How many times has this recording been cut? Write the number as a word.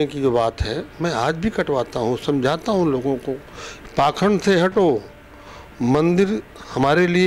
zero